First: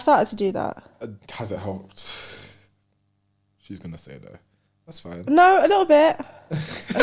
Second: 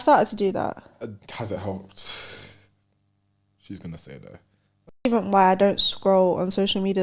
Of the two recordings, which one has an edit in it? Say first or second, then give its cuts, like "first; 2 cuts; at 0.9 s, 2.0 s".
second; 1 cut; at 5.1 s